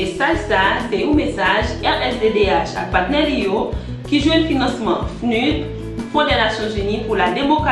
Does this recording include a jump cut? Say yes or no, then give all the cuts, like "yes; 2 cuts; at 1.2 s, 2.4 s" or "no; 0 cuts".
yes; 1 cut; at 6.3 s